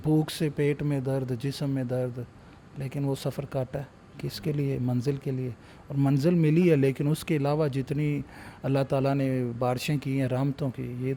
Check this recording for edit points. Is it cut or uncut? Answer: uncut